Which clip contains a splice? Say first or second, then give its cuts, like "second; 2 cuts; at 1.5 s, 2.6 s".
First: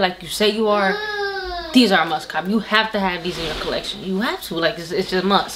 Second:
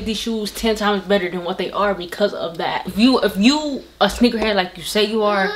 second; 1 cut; at 2.9 s